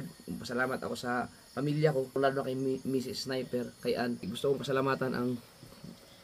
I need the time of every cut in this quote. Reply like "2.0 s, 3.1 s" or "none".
2.2 s, 4.3 s